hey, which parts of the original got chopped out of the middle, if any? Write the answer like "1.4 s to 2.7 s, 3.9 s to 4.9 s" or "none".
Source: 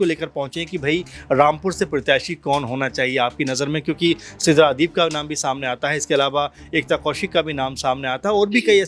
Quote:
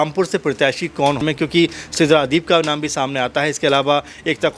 2.7 s to 3.7 s